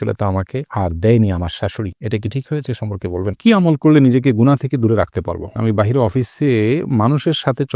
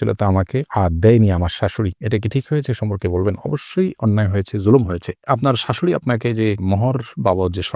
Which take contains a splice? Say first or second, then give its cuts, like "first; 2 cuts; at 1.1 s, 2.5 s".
first; 2 cuts; at 3.3 s, 5.6 s